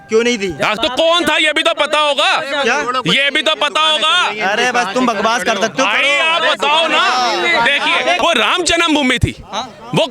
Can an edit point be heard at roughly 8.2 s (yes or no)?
yes